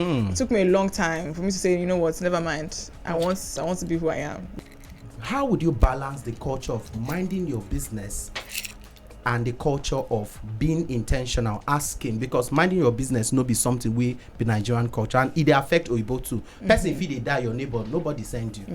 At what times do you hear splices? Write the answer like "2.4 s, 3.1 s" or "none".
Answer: 4.4 s